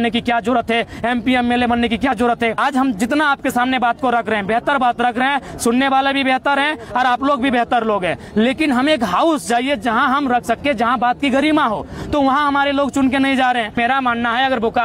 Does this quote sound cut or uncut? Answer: cut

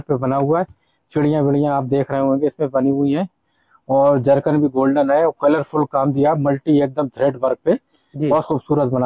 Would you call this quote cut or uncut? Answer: uncut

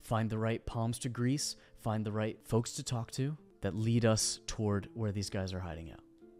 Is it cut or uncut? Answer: cut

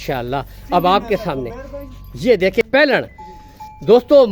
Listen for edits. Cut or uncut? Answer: cut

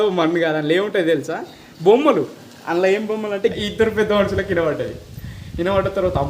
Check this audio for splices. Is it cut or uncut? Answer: cut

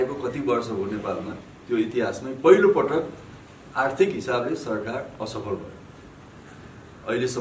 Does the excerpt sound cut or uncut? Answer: uncut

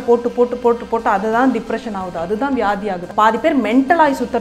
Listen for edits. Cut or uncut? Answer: cut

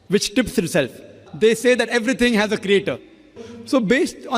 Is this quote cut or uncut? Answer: cut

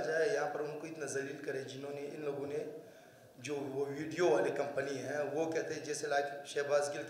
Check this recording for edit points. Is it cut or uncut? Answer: uncut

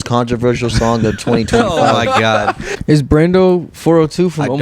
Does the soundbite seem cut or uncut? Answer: cut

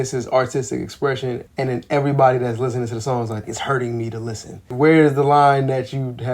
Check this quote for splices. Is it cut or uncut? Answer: cut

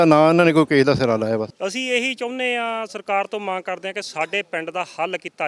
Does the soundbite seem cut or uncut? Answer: cut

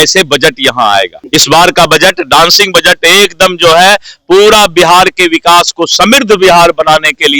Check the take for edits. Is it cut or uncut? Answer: cut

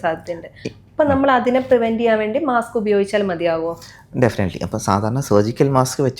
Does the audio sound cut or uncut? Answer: uncut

